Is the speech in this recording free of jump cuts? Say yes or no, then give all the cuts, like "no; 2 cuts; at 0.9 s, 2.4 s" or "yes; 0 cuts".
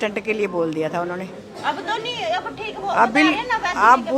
yes; 0 cuts